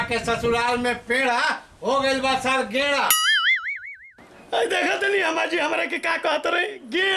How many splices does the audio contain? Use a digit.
0